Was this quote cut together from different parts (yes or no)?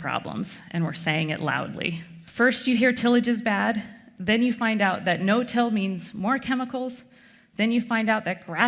yes